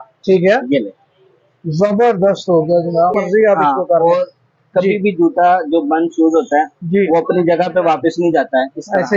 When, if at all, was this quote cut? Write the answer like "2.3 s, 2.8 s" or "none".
3.2 s